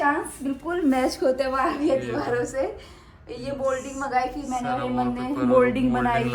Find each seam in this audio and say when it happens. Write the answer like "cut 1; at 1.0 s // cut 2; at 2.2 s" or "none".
none

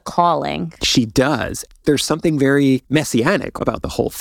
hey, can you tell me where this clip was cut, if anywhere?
cut 1; at 1.7 s // cut 2; at 3.2 s

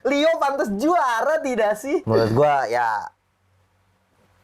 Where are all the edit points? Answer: cut 1; at 2.0 s

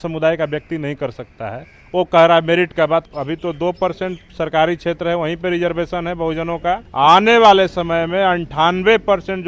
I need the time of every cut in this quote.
cut 1; at 3.0 s // cut 2; at 4.2 s // cut 3; at 6.9 s

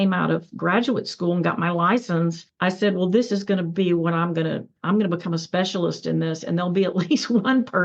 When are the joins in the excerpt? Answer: cut 1; at 2.5 s

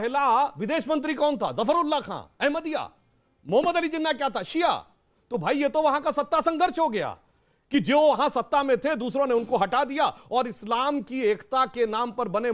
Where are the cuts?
none

